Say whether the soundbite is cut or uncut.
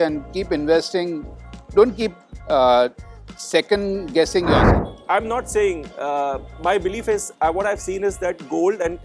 cut